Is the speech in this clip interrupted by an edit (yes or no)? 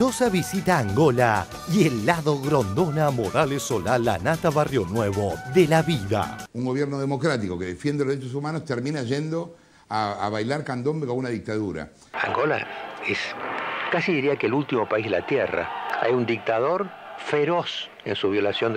yes